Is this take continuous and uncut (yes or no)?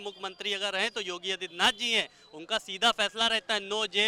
yes